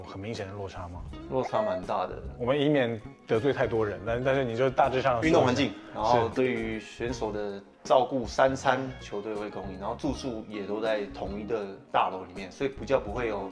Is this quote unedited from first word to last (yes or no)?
yes